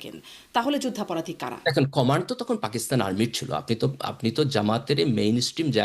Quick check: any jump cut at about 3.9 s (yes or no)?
no